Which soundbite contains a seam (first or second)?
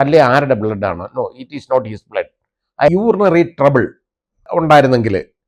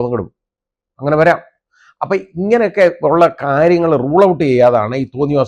first